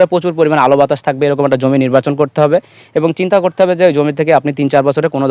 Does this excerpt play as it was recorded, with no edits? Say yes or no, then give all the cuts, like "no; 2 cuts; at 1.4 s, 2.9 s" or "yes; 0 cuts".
yes; 0 cuts